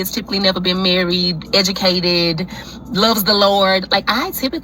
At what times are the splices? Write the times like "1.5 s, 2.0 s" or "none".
1.4 s